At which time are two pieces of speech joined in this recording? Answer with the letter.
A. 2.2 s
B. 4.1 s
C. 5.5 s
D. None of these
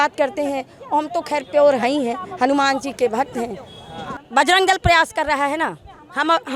D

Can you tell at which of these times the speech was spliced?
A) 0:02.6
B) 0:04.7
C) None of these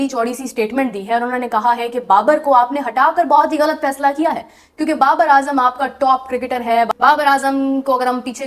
C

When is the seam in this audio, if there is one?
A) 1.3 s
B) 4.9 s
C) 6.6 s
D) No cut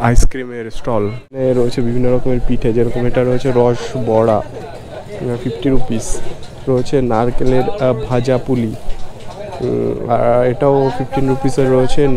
A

